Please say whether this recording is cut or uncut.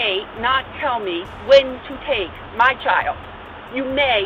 uncut